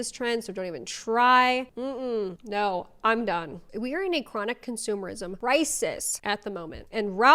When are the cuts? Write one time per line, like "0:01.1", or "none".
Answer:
0:03.6
0:05.3
0:06.1